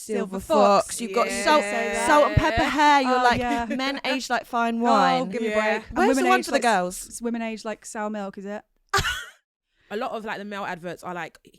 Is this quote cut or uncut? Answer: cut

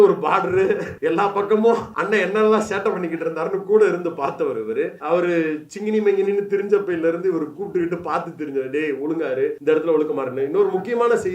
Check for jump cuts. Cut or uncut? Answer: cut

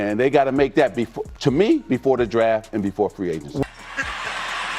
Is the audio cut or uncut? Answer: cut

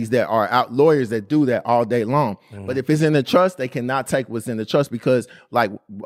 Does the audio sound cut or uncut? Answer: uncut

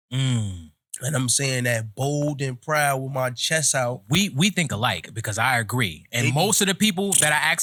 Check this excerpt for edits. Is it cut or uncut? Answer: uncut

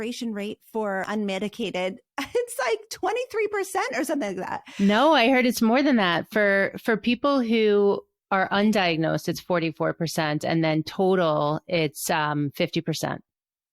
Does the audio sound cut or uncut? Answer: cut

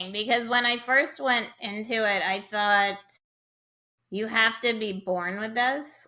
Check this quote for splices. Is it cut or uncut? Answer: uncut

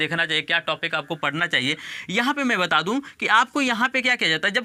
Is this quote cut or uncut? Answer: uncut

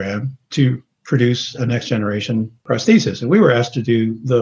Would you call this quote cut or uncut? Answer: cut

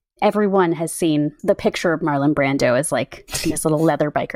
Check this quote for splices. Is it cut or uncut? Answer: cut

